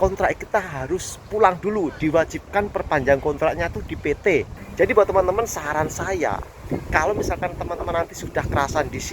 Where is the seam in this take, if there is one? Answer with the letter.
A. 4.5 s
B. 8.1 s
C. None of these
A